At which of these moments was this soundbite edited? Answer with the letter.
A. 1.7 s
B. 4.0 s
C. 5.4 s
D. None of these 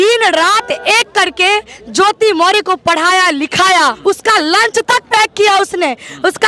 B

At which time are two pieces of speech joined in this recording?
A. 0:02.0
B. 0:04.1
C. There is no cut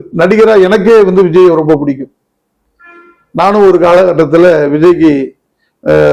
C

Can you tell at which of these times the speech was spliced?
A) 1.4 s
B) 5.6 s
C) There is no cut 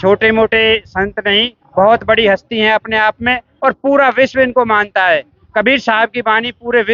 C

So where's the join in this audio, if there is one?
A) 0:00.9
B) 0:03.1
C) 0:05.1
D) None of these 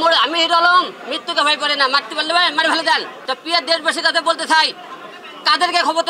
B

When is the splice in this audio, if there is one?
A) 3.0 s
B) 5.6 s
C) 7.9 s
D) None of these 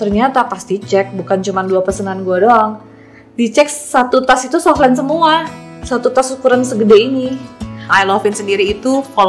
C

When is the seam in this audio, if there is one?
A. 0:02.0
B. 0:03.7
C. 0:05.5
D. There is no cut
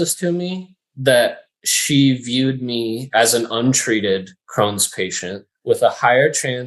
C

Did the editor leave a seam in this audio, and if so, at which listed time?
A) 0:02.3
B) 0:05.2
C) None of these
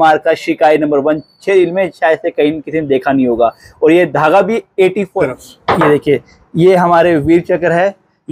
B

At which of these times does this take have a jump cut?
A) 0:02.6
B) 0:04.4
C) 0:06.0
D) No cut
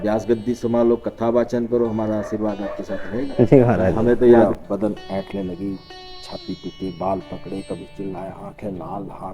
B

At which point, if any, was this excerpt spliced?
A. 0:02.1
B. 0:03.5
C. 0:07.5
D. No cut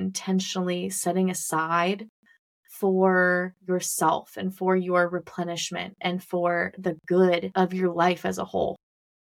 C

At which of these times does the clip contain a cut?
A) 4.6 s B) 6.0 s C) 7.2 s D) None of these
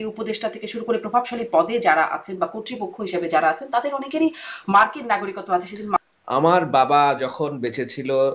B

